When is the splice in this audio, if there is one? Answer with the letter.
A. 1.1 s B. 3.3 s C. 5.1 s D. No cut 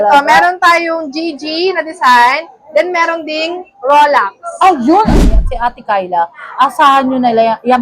C